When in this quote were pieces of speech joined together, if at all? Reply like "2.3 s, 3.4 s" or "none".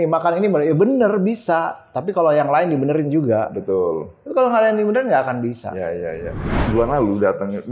6.6 s